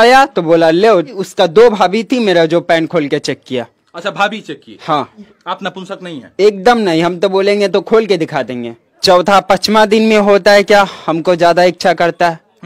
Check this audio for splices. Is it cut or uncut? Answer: cut